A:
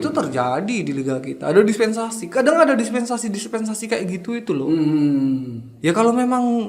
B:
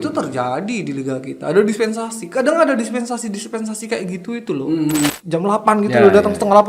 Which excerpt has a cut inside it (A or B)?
B